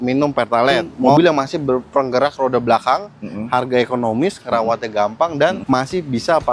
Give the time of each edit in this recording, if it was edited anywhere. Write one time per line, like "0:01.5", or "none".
0:01.2
0:05.6